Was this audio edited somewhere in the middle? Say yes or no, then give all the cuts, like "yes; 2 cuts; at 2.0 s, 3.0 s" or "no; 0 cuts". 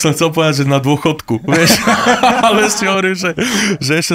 no; 0 cuts